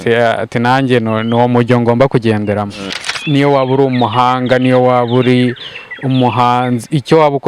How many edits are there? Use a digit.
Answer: 1